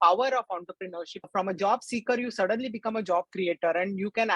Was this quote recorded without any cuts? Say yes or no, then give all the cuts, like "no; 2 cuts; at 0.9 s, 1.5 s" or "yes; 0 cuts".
no; 1 cut; at 1.2 s